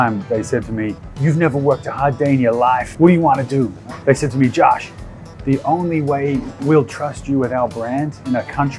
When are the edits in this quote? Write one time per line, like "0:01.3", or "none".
0:01.0
0:02.9
0:03.8